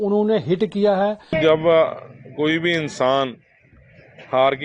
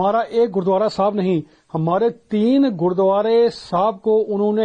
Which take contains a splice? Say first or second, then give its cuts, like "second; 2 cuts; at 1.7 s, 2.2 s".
first; 1 cut; at 1.4 s